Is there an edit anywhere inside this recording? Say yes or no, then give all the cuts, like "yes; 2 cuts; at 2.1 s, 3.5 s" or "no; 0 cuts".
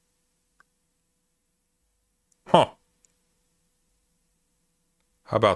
no; 0 cuts